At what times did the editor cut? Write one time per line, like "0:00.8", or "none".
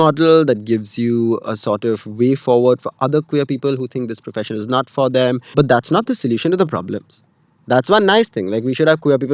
0:05.5